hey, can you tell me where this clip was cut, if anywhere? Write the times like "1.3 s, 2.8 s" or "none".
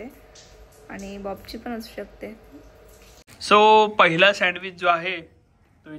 3.3 s